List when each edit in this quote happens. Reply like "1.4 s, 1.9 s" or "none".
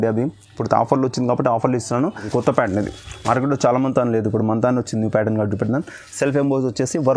2.2 s